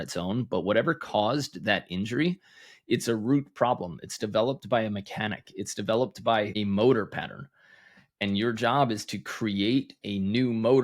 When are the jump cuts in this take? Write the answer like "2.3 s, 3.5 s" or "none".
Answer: 6.5 s